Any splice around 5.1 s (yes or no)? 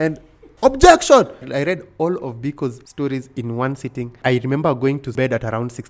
yes